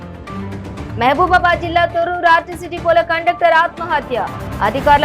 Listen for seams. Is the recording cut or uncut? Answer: uncut